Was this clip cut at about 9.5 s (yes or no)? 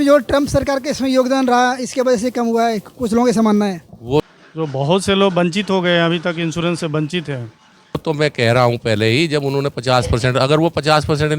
no